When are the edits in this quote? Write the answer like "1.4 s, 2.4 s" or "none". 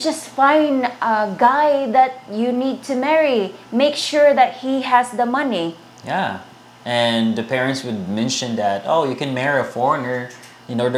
none